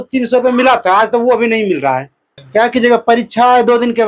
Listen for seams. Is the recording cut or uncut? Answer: cut